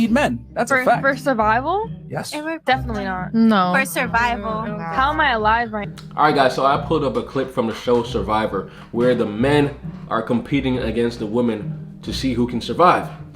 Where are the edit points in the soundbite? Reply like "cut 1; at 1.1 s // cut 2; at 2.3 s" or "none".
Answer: cut 1; at 5.9 s